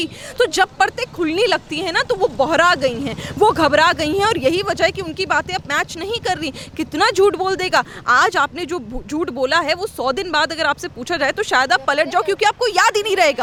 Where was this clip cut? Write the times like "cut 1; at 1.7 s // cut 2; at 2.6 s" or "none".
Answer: none